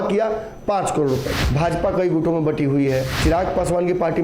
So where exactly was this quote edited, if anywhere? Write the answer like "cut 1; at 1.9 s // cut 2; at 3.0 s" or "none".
cut 1; at 1.4 s // cut 2; at 3.1 s